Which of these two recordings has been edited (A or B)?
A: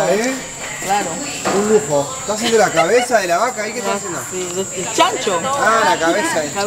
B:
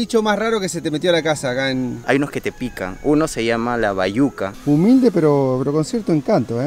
B